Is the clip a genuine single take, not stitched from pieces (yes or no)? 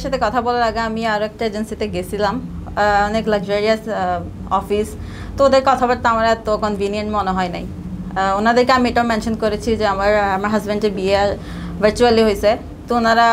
yes